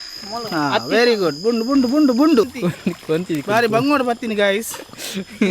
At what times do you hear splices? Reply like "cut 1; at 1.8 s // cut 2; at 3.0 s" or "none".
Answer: cut 1; at 2.5 s

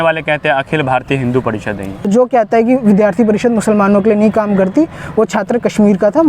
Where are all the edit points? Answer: cut 1; at 2.0 s

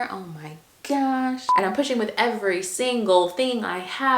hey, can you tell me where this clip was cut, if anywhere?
cut 1; at 1.5 s

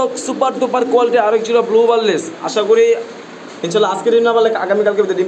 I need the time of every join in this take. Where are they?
none

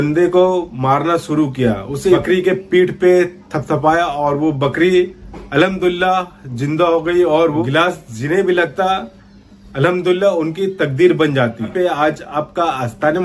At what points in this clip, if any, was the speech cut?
cut 1; at 1.9 s // cut 2; at 7.6 s // cut 3; at 11.7 s

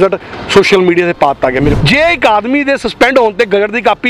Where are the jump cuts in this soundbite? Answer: cut 1; at 1.8 s

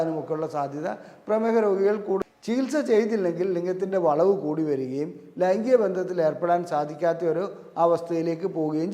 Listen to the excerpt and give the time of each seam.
cut 1; at 2.2 s

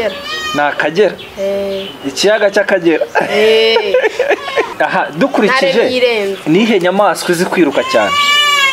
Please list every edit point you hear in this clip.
cut 1; at 4.7 s

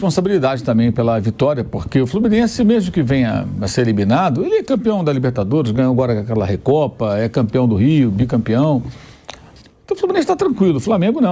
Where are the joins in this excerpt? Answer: none

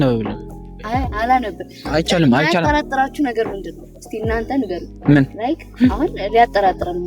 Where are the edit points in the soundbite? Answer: cut 1; at 4.9 s

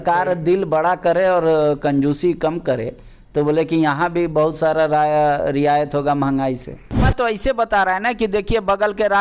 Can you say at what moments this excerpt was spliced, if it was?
cut 1; at 7.0 s

